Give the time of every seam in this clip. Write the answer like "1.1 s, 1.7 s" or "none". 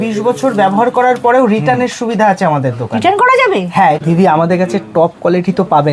4.0 s